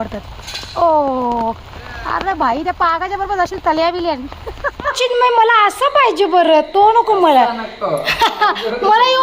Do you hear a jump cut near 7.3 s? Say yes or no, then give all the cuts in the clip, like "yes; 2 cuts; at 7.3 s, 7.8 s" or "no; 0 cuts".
no; 1 cut; at 4.9 s